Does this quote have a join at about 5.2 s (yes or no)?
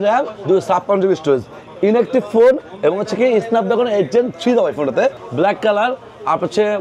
yes